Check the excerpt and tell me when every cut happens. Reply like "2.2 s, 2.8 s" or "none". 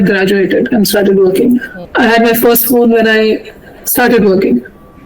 1.8 s